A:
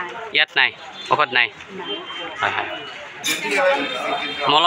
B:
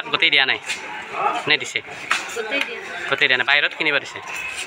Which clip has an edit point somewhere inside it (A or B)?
A